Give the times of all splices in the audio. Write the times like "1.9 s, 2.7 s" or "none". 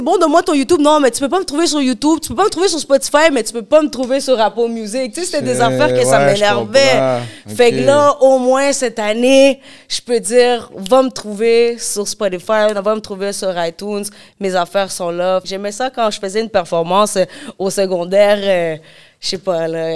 15.5 s